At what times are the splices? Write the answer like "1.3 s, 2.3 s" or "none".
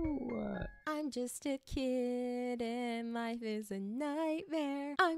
none

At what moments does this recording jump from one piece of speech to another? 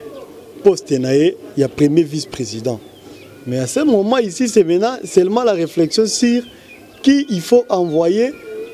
none

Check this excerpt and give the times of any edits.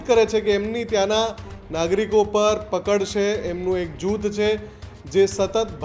none

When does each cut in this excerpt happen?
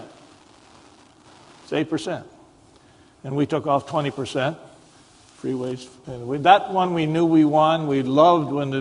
none

